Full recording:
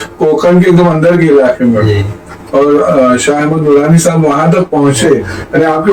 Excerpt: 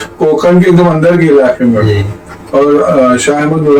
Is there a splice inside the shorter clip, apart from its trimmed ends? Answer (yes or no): no